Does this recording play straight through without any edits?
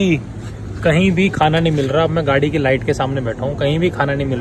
yes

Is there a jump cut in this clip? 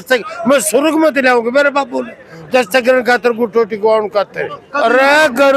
yes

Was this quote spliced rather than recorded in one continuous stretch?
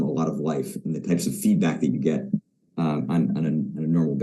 no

